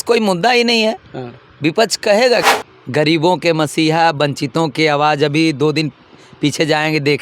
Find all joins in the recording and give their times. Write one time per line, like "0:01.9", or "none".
0:02.4

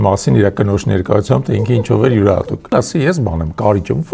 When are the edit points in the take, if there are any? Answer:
0:02.7

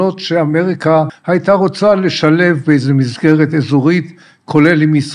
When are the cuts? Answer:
0:01.2

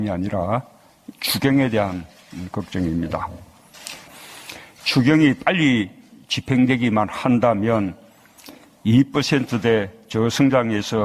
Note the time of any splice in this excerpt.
none

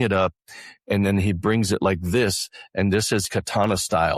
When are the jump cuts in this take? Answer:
0:03.2

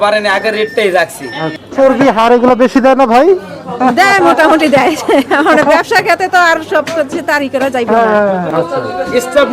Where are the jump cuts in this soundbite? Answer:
0:01.6
0:08.5

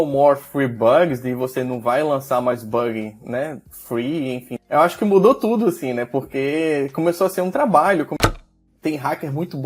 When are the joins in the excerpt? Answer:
0:04.5
0:08.2

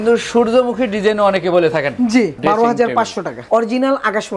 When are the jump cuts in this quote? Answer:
0:02.4
0:03.4

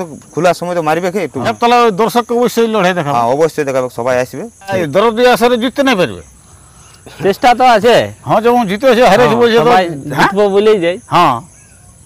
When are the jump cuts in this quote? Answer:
0:01.5
0:04.8

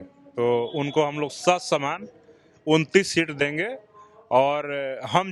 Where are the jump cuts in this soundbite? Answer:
none

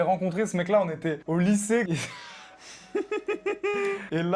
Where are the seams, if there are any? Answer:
none

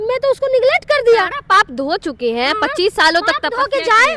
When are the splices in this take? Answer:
none

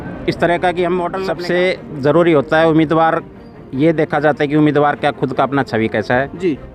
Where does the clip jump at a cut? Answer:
0:01.3

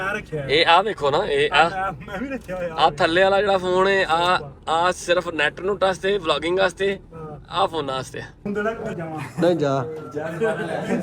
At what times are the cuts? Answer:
0:08.5

